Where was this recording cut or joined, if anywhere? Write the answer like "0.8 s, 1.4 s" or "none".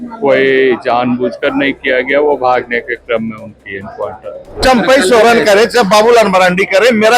4.6 s